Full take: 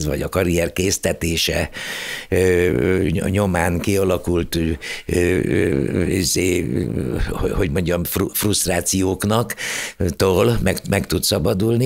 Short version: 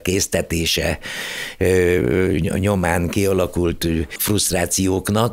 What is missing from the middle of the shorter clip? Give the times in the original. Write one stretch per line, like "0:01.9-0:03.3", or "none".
0:04.9-0:08.3

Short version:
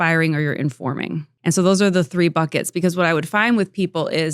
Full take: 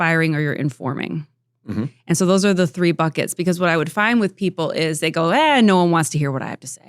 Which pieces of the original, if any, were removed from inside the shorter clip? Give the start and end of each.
0:01.3-0:02.0

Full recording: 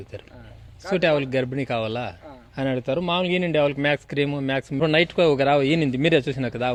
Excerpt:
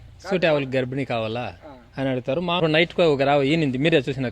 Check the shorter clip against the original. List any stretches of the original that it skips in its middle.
0:03.2-0:04.8

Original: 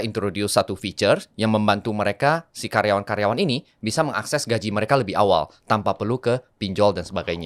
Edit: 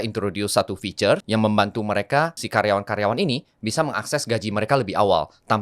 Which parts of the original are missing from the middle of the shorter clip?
0:01.2-0:01.3
0:02.5-0:02.6

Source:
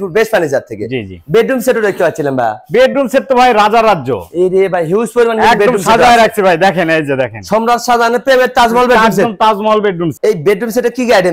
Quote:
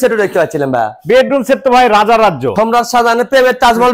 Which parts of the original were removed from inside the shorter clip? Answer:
0:04.1-0:07.4

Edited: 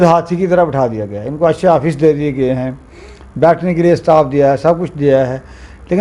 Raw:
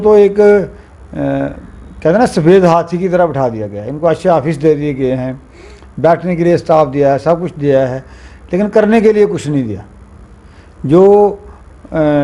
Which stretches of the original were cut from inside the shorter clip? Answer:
none

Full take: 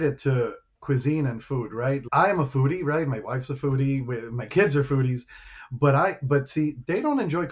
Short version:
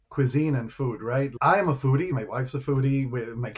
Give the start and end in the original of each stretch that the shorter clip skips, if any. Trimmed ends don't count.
0:02.8-0:03.1

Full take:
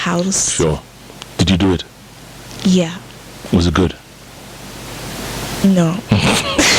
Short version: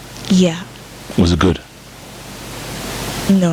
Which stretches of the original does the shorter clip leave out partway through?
none

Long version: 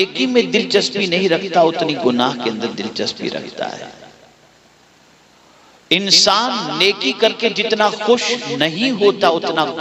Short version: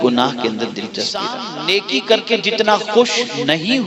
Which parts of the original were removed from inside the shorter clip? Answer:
0:03.4-0:06.5

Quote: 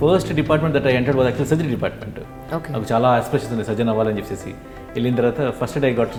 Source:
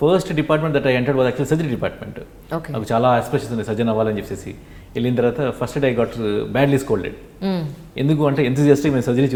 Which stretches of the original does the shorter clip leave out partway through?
none

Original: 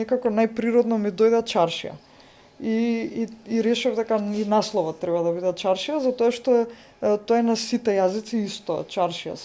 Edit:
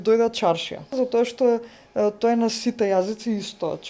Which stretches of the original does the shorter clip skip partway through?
0:02.1-0:06.0

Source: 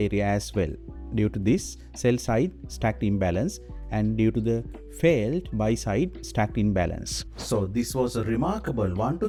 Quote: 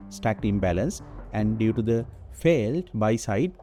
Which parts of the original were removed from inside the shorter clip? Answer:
none

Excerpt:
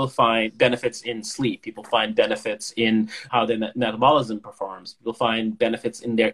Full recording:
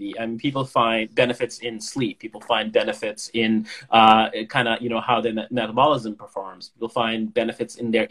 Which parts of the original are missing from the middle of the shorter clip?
0:03.8-0:04.9

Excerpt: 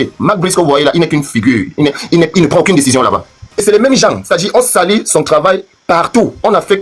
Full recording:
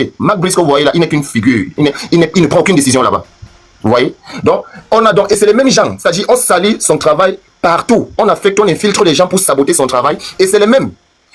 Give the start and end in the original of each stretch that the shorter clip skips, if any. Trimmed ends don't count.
0:03.6-0:05.4

